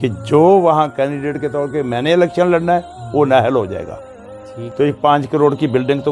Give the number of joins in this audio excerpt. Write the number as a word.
one